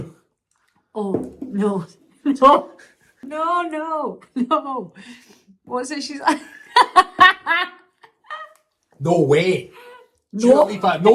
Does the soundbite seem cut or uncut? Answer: cut